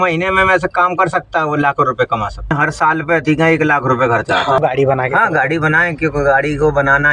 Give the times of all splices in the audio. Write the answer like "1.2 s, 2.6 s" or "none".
2.5 s, 4.6 s